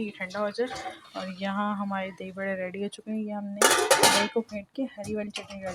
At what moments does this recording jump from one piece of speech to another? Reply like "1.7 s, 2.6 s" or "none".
none